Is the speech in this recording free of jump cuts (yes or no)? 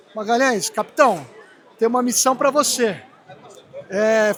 yes